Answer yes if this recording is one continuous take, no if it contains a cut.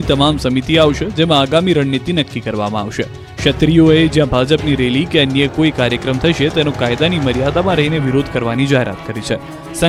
yes